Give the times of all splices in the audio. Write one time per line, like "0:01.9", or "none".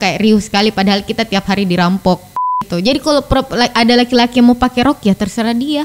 0:02.6